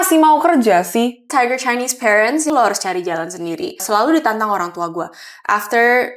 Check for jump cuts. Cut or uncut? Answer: cut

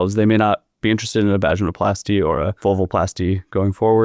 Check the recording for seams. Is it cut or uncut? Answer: cut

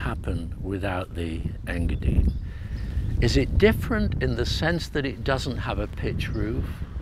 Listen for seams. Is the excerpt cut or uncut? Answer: uncut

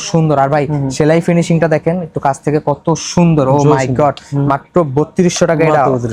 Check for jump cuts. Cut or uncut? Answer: uncut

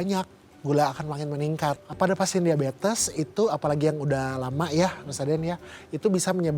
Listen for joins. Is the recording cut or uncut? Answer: cut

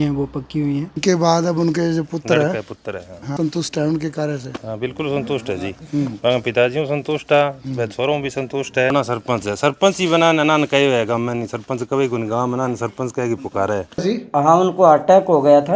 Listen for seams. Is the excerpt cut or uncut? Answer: cut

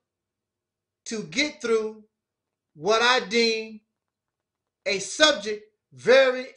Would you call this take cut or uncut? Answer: cut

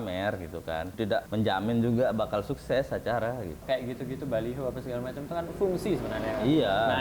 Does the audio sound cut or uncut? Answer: cut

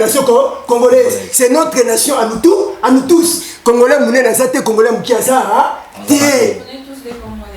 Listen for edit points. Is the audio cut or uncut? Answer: uncut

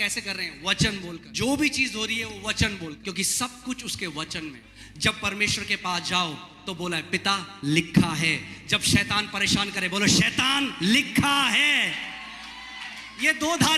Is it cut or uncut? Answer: cut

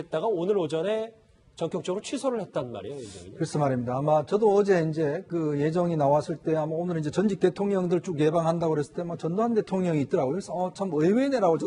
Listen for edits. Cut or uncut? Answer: cut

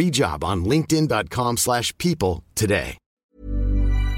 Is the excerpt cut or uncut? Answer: cut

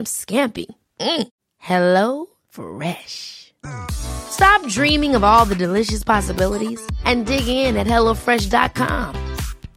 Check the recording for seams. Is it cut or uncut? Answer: uncut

